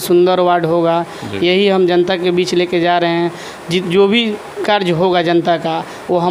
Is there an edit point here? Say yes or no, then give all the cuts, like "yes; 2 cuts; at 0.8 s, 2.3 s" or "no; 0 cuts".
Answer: no; 0 cuts